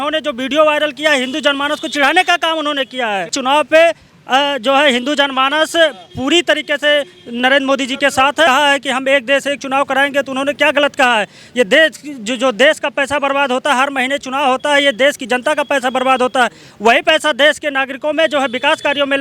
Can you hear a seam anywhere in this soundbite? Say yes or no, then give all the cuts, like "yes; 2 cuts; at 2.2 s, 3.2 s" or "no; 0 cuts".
yes; 2 cuts; at 3.4 s, 8.5 s